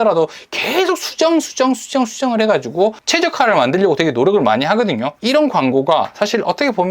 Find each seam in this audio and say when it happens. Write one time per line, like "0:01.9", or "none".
0:03.0
0:05.1